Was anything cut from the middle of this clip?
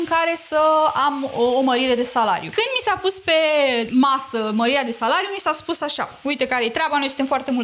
yes; 2 cuts; at 2.5 s, 3.9 s

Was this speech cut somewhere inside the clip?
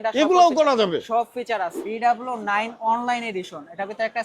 yes; 1 cut; at 1.8 s

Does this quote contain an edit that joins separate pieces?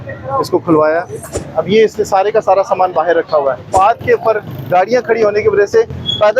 yes; 2 cuts; at 1.2 s, 3.7 s

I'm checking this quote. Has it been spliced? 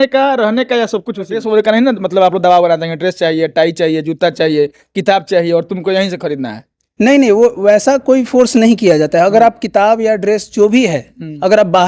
yes; 1 cut; at 1.4 s

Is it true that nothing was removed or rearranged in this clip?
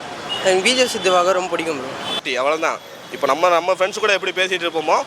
no; 1 cut; at 2.2 s

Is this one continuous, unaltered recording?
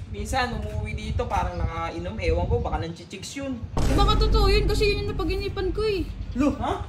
no; 1 cut; at 3.9 s

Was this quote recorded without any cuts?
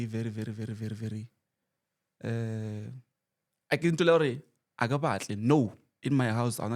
yes; 0 cuts

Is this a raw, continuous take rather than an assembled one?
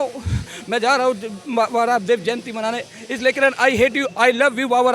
yes; 0 cuts

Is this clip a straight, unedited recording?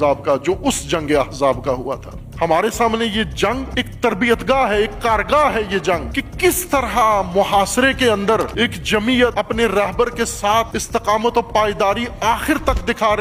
yes; 0 cuts

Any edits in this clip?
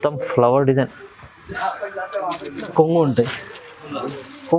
yes; 1 cut; at 2.7 s

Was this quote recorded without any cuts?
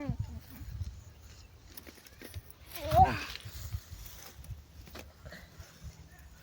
yes; 0 cuts

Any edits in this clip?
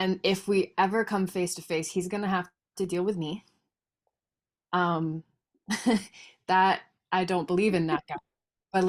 no; 0 cuts

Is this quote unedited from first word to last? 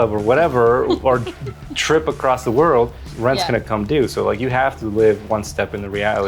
no; 1 cut; at 3.0 s

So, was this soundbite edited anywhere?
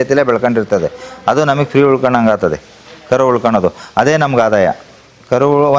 no; 0 cuts

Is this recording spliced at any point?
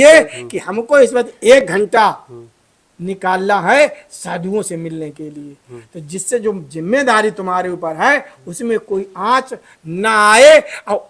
no; 0 cuts

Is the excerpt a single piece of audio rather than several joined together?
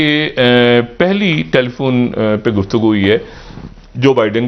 yes; 0 cuts

